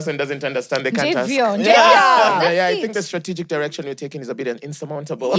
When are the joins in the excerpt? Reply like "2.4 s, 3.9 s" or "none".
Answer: none